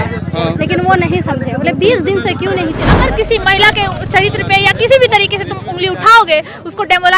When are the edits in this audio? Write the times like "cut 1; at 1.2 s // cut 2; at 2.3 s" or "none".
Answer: cut 1; at 2.9 s